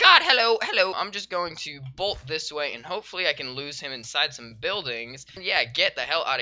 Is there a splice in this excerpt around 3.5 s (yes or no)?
no